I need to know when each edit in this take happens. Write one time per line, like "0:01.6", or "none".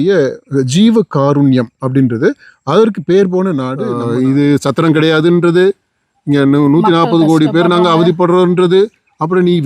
0:03.8